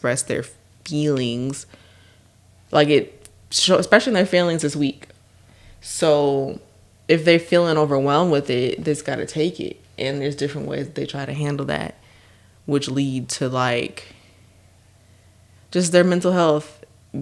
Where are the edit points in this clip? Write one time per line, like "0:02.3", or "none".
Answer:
none